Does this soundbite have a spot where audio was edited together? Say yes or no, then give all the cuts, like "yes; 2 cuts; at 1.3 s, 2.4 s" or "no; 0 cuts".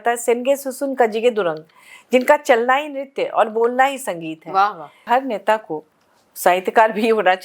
yes; 1 cut; at 5.0 s